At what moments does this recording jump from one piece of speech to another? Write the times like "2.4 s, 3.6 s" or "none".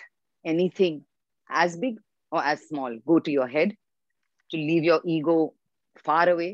none